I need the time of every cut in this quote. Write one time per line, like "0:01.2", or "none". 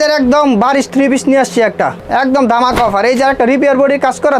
0:02.0